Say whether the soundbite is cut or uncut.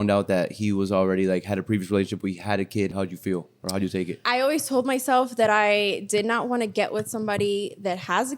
cut